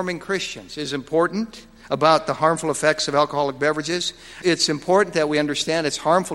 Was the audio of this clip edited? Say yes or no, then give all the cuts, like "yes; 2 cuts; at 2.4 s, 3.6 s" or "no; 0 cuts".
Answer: yes; 1 cut; at 4.4 s